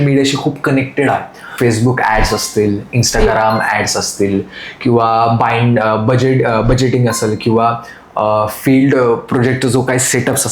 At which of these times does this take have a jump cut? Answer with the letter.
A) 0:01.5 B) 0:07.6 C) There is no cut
A